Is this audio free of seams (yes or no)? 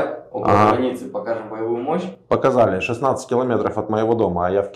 yes